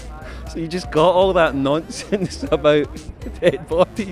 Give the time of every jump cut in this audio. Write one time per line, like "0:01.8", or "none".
none